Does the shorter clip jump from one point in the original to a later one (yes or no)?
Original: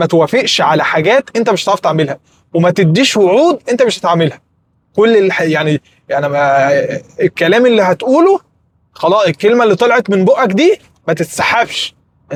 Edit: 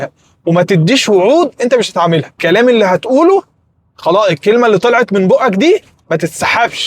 yes